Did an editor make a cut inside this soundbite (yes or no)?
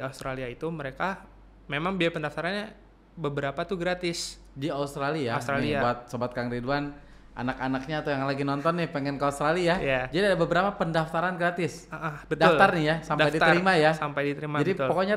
no